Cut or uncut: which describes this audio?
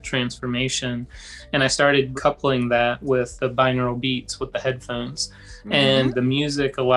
cut